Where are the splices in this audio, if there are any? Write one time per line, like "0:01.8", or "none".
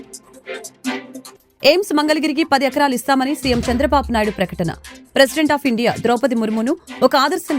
0:01.2